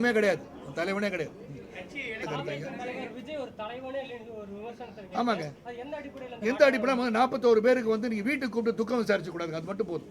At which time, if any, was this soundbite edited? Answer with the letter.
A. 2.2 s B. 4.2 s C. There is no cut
A